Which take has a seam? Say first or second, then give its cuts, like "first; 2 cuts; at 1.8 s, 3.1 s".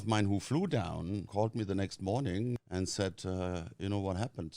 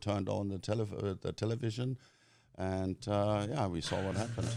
first; 2 cuts; at 1.3 s, 2.6 s